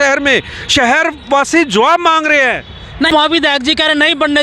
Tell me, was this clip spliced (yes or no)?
yes